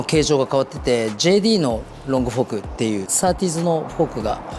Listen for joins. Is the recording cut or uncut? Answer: uncut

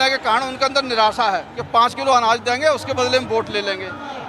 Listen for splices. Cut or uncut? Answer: cut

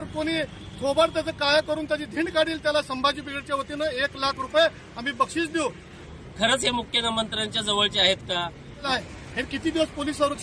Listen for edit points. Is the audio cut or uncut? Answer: cut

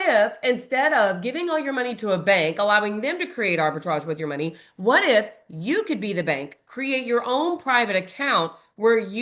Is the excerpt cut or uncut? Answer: uncut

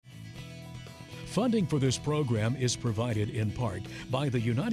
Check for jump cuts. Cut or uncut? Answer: cut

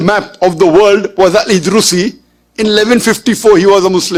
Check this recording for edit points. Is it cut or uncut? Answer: uncut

